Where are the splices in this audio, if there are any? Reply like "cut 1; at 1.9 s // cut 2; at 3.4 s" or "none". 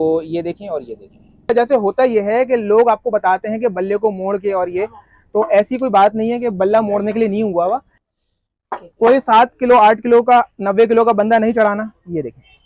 cut 1; at 1.5 s // cut 2; at 8.0 s